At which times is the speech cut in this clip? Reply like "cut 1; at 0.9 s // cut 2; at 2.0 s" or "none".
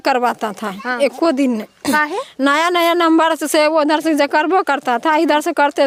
none